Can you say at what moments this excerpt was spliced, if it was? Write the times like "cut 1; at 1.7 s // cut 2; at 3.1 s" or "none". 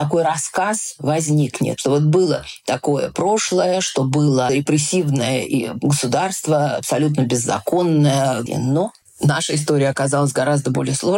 cut 1; at 1.8 s // cut 2; at 4.5 s // cut 3; at 8.4 s